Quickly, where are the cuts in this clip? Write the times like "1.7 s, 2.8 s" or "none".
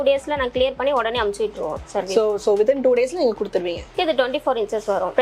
3.9 s